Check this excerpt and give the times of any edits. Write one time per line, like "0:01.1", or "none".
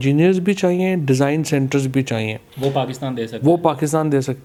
none